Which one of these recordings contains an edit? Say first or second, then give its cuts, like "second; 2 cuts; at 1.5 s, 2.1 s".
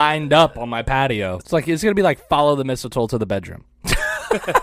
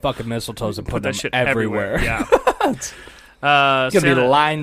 first; 1 cut; at 1.4 s